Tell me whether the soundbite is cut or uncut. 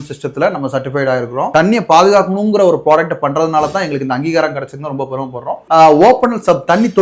cut